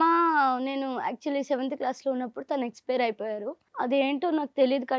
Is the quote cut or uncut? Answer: cut